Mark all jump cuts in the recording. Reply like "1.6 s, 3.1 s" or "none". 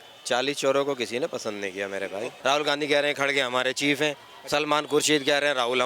2.3 s

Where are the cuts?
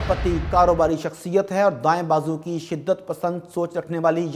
none

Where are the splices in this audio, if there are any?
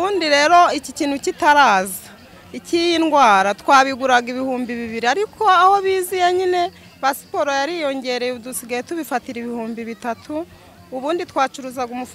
none

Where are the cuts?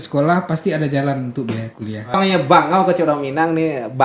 2.2 s

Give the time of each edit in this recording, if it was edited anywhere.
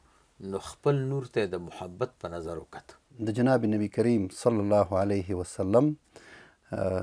3.0 s

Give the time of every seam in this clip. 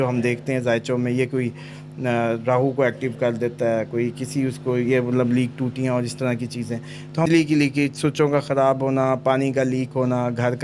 7.3 s

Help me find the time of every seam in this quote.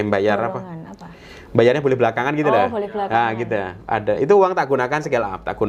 none

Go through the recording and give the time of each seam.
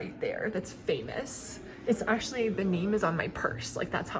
none

